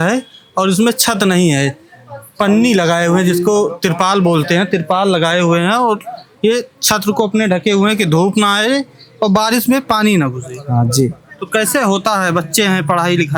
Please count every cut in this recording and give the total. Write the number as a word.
zero